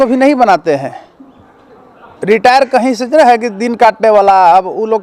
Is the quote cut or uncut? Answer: uncut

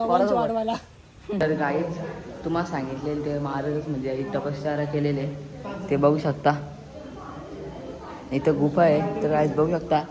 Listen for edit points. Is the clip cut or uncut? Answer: cut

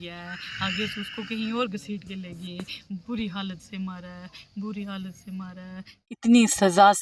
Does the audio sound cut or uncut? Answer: cut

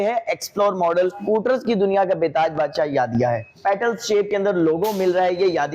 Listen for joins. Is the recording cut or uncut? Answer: cut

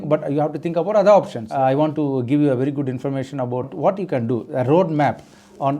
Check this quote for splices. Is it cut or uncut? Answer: cut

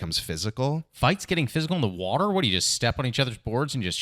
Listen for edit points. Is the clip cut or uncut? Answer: cut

